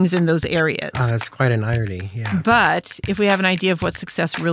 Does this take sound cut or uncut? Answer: uncut